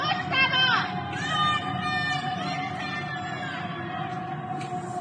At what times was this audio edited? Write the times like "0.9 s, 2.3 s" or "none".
none